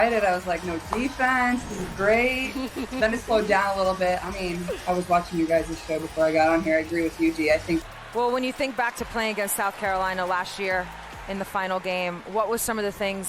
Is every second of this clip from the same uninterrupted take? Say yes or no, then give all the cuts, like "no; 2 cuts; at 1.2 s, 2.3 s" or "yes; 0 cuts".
no; 1 cut; at 8.0 s